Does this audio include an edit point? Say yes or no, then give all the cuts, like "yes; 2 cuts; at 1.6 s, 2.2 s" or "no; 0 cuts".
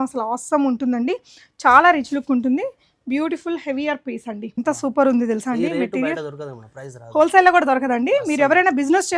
yes; 1 cut; at 4.5 s